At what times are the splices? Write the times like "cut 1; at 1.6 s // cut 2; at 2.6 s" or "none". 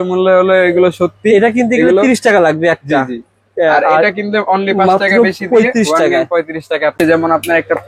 cut 1; at 7.0 s